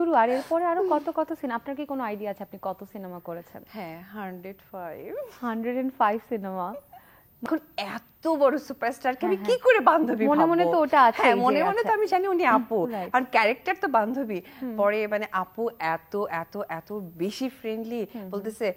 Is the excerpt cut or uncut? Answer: cut